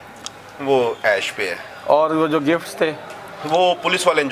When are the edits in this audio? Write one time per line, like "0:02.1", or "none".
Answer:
none